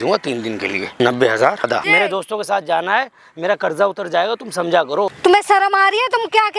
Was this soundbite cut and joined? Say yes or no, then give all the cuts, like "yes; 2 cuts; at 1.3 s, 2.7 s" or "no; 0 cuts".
yes; 3 cuts; at 0.9 s, 1.7 s, 5.1 s